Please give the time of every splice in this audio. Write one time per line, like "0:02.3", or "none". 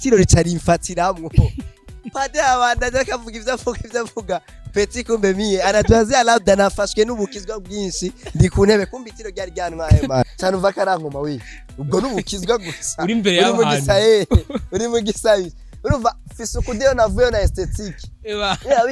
0:10.3